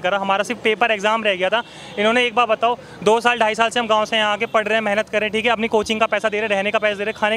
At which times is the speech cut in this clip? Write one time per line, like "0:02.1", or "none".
none